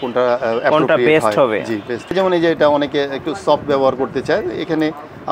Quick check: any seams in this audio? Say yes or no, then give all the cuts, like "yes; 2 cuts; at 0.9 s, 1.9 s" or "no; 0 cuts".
yes; 1 cut; at 2.1 s